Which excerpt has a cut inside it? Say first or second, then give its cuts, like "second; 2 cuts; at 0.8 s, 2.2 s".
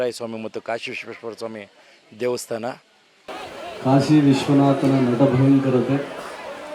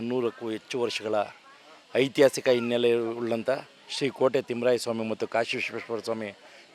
first; 1 cut; at 3.4 s